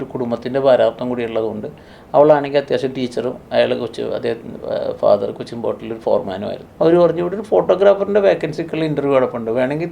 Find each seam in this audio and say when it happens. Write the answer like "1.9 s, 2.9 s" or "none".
6.6 s